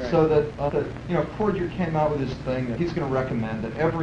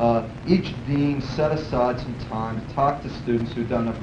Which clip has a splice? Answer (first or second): first